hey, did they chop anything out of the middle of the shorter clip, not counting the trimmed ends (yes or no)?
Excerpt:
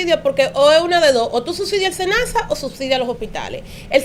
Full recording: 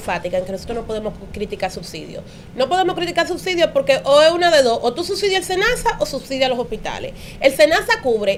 no